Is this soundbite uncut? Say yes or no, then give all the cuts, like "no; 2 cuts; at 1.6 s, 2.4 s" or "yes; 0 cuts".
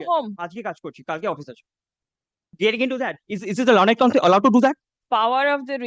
no; 2 cuts; at 2.5 s, 5.0 s